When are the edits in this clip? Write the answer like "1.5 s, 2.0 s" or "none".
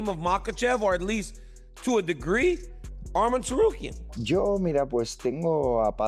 3.9 s